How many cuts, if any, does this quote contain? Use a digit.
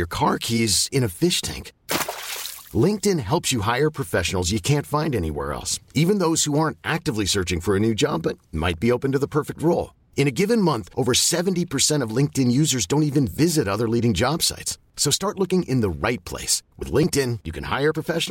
0